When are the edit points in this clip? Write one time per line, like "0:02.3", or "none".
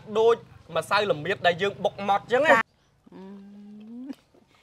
0:02.7